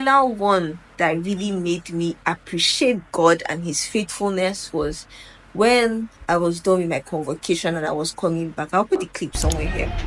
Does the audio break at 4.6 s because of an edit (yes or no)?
no